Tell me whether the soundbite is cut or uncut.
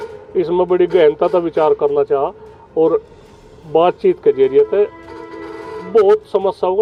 uncut